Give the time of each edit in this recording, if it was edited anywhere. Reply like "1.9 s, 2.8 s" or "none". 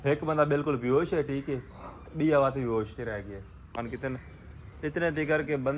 3.8 s